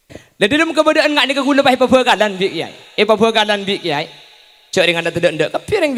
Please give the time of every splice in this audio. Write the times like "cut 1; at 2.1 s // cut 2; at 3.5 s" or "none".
none